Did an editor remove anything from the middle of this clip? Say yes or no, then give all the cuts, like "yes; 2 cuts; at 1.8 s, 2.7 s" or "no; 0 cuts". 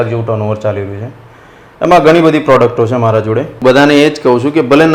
yes; 1 cut; at 3.5 s